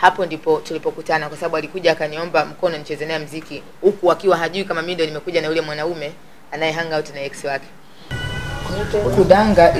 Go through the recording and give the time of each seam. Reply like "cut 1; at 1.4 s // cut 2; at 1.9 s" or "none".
cut 1; at 8.2 s